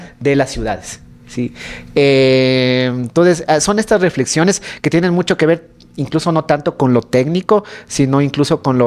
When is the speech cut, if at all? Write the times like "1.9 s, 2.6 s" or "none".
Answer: none